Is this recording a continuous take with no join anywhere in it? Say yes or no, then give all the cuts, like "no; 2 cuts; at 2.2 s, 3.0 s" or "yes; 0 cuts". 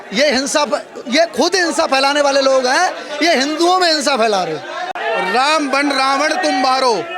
no; 1 cut; at 5.0 s